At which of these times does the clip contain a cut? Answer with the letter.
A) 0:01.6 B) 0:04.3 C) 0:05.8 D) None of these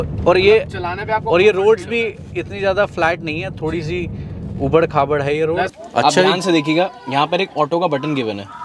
C